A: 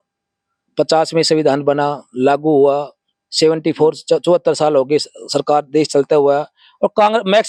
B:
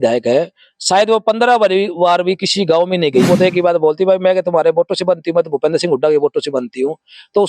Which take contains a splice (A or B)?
B